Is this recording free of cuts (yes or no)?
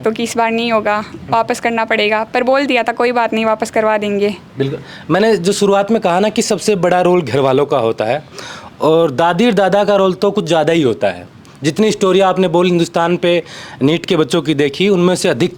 yes